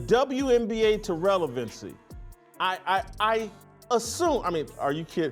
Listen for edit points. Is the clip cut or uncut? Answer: cut